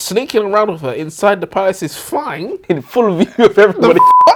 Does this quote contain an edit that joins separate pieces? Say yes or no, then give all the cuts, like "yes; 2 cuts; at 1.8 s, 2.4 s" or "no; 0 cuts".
no; 0 cuts